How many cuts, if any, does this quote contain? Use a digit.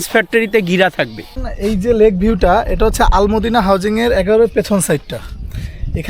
1